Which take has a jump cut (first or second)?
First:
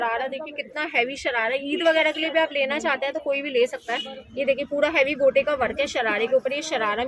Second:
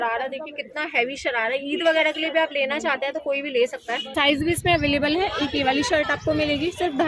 second